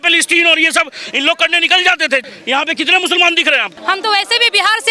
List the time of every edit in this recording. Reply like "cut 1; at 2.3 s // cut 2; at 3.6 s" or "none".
cut 1; at 2.2 s // cut 2; at 3.7 s

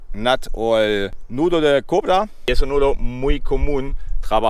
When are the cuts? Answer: cut 1; at 1.2 s // cut 2; at 2.4 s

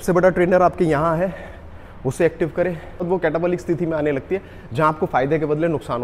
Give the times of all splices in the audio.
cut 1; at 3.0 s

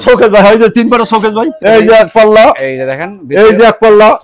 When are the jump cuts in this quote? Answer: cut 1; at 1.5 s

